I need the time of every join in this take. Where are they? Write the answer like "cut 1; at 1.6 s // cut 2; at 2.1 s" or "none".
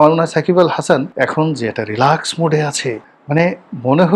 cut 1; at 1.1 s // cut 2; at 3.1 s